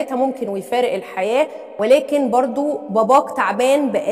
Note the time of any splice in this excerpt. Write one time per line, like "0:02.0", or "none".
none